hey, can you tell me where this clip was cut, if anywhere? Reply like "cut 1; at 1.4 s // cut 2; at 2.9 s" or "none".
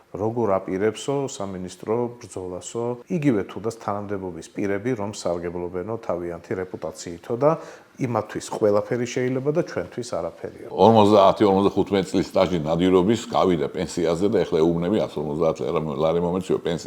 cut 1; at 3.0 s // cut 2; at 10.6 s